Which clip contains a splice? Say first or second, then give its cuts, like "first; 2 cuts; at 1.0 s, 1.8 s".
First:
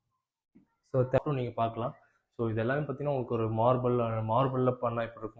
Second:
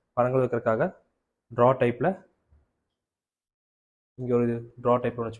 first; 1 cut; at 1.2 s